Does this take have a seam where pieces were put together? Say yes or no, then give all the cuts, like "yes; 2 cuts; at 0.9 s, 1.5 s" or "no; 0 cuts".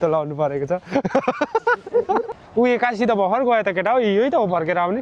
yes; 1 cut; at 2.4 s